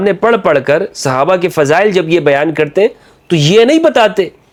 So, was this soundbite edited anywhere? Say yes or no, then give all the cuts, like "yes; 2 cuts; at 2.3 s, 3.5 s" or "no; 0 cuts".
no; 0 cuts